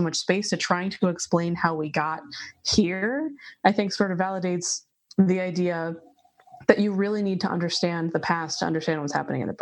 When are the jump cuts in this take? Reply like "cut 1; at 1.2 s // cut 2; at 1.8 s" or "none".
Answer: none